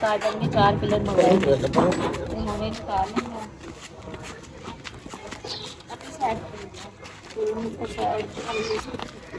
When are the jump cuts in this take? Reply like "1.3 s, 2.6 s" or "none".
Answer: none